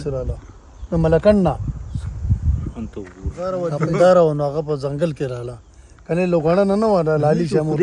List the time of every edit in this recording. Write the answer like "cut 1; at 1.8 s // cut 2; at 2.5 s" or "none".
cut 1; at 3.6 s